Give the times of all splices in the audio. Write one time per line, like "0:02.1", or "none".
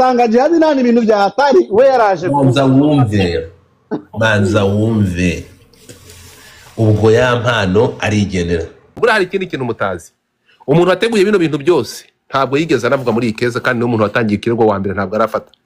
0:08.9